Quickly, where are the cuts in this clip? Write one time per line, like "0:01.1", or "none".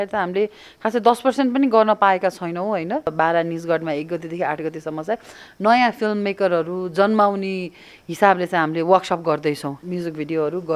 0:03.1
0:09.7